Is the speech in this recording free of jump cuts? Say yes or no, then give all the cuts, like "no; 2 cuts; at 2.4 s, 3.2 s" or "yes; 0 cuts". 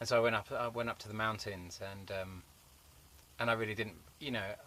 yes; 0 cuts